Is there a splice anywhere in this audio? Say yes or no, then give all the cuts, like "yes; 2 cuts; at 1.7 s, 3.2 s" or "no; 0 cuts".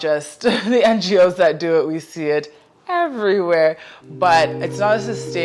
no; 0 cuts